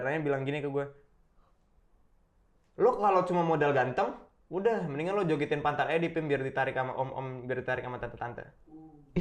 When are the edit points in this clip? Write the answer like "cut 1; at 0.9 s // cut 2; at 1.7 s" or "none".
none